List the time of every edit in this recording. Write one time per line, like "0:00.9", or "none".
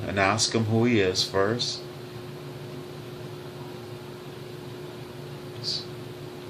0:02.9